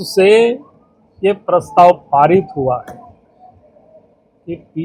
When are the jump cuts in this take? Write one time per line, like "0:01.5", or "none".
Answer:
none

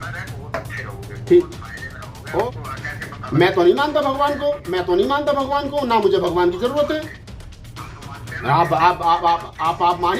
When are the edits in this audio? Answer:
0:02.4

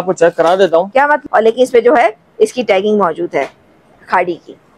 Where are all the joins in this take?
0:01.2

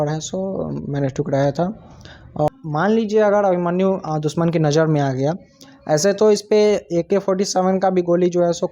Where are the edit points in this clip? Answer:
0:02.5

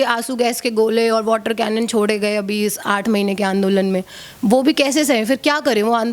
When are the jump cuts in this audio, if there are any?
none

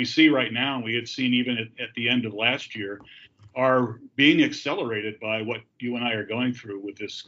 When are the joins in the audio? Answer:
none

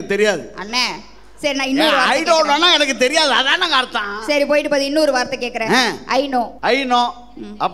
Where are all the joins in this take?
0:06.5

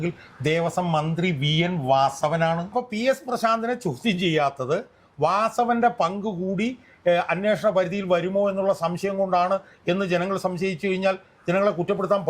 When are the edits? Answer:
0:02.7

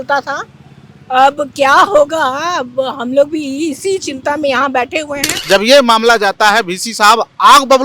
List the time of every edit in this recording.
0:05.3

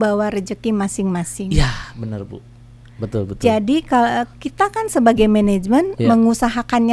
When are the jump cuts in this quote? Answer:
none

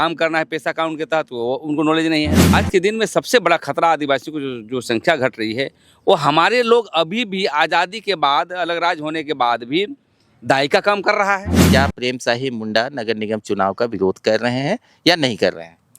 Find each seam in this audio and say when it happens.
0:02.5
0:11.6

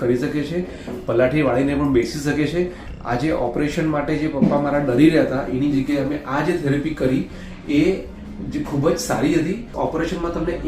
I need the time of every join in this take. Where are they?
0:02.8
0:09.7

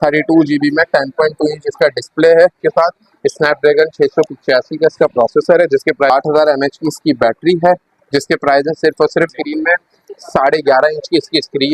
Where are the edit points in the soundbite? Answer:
0:02.6
0:06.1
0:09.3

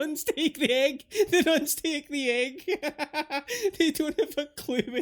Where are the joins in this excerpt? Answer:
none

